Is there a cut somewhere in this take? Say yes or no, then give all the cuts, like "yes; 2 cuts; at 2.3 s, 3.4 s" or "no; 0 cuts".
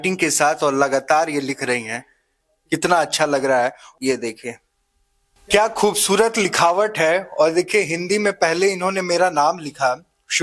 no; 0 cuts